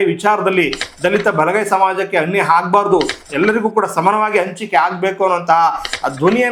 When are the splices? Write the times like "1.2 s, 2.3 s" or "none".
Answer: none